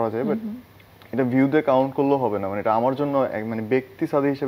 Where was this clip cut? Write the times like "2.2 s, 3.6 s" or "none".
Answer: none